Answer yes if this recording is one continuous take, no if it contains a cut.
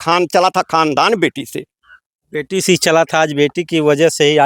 yes